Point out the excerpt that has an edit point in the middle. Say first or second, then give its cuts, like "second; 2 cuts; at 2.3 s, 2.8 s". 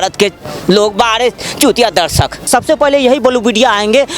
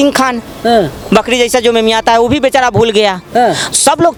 first; 1 cut; at 2.4 s